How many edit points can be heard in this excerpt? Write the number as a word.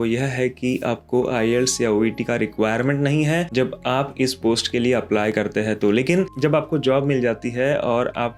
zero